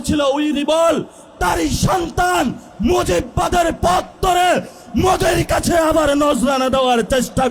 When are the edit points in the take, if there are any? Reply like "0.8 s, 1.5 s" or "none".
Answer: none

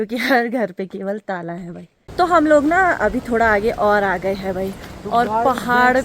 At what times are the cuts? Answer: 1.9 s

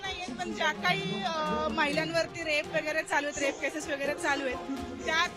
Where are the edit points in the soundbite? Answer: none

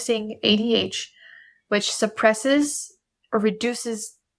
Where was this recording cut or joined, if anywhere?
none

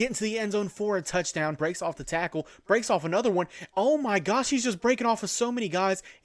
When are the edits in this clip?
1.6 s

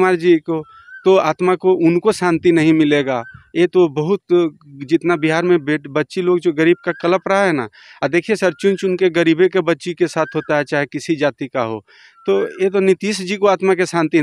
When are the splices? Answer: none

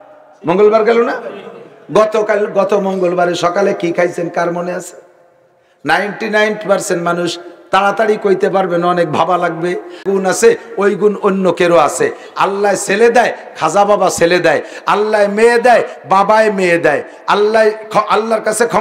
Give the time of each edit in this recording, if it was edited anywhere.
10.0 s

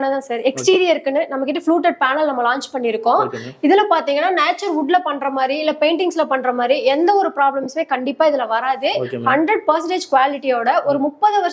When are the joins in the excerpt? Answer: none

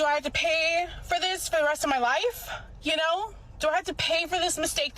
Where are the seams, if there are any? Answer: 4.0 s

